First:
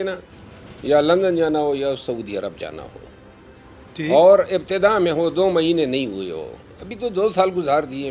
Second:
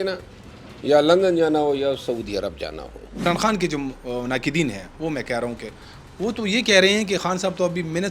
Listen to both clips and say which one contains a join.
second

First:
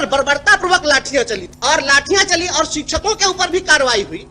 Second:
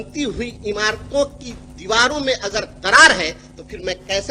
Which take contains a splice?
first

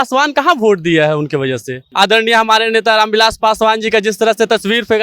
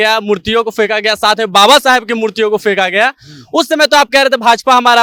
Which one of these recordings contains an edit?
first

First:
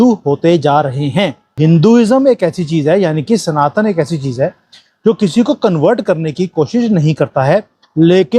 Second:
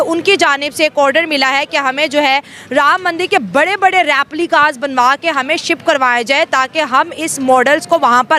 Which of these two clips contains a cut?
first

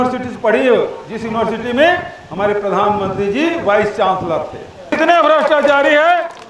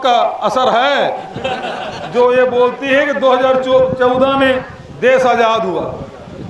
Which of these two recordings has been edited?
first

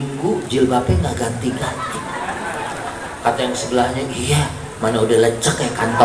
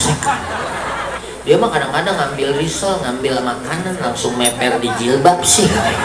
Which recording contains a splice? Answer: second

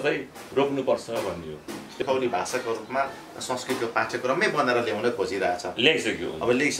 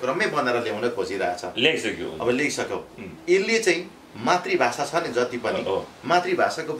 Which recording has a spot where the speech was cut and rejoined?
first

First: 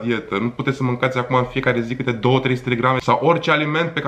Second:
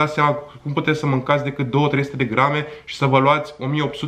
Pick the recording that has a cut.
first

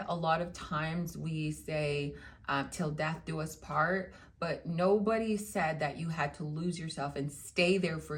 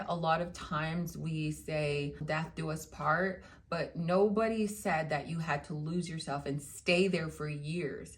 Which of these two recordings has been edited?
second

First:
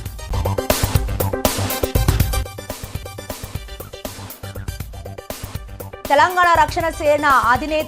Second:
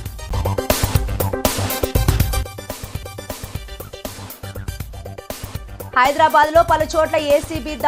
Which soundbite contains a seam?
first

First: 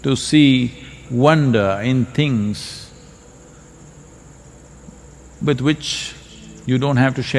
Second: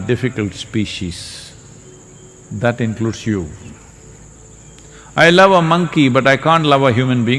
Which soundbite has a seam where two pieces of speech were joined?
second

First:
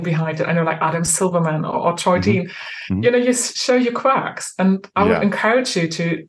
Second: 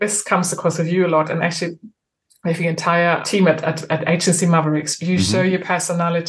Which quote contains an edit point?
second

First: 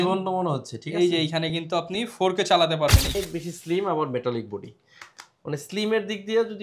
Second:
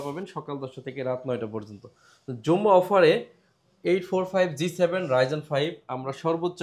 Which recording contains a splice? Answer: first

